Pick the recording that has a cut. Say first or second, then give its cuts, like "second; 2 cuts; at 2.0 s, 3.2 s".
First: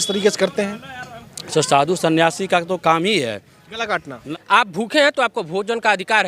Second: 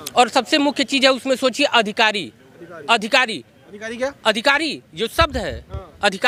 first; 1 cut; at 4.2 s